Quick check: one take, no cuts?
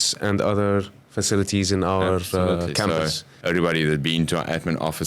no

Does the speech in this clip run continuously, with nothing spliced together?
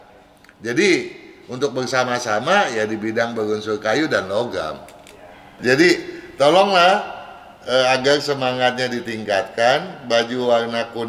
no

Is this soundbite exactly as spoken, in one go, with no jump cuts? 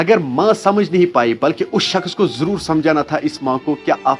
yes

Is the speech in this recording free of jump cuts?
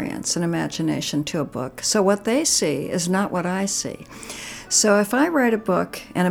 yes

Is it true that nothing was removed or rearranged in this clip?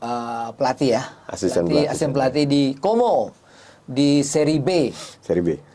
yes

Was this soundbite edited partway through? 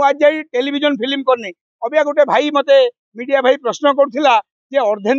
no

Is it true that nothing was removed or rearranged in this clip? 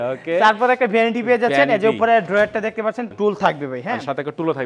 no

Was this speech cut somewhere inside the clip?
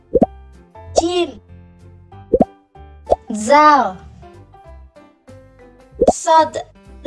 yes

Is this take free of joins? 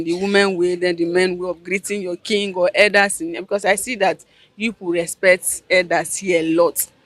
yes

